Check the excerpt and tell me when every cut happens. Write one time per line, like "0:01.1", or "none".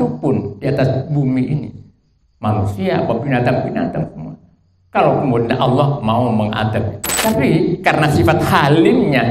0:07.0